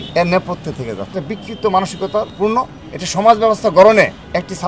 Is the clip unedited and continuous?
no; 2 cuts; at 1.1 s, 2.3 s

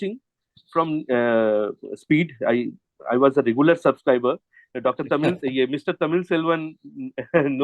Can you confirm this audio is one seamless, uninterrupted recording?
yes; 0 cuts

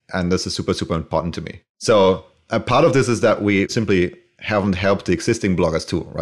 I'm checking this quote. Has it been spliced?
no; 0 cuts

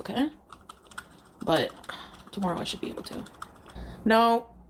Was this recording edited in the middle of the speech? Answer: no; 0 cuts

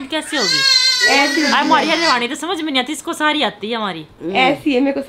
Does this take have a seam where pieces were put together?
no; 0 cuts

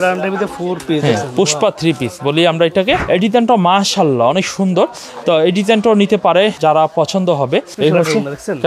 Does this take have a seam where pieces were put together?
yes; 3 cuts; at 3.0 s, 6.6 s, 7.7 s

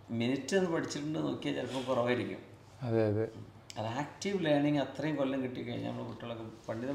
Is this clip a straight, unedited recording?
yes; 0 cuts

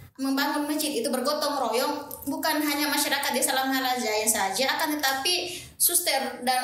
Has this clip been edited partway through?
no; 0 cuts

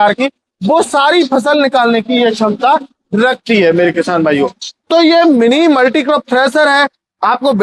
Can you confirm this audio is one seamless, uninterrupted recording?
yes; 0 cuts

